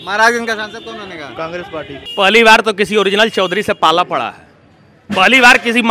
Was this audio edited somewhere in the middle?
yes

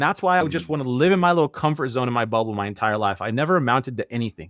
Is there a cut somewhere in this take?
no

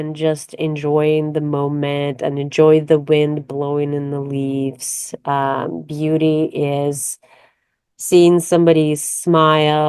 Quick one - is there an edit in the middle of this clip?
no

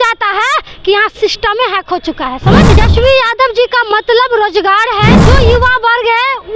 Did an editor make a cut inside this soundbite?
yes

